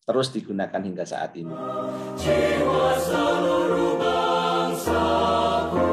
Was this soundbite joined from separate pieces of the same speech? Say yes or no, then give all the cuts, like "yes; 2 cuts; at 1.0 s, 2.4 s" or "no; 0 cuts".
yes; 1 cut; at 1.5 s